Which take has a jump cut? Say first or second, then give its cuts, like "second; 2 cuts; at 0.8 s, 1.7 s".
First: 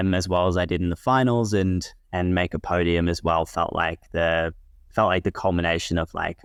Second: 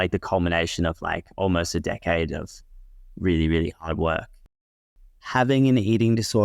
second; 1 cut; at 4.7 s